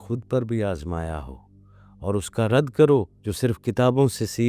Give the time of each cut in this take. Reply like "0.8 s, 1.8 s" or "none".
3.2 s